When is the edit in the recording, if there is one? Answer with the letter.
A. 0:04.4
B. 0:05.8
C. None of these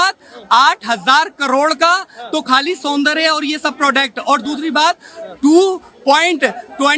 C